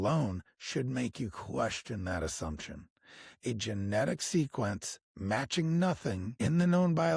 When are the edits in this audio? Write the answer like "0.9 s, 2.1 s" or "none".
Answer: 6.3 s